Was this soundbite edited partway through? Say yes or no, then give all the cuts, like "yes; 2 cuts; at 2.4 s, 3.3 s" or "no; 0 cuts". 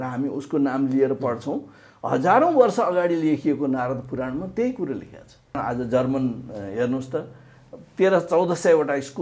yes; 1 cut; at 5.6 s